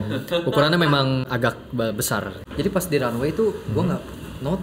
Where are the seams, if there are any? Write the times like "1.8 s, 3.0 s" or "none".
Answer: 2.3 s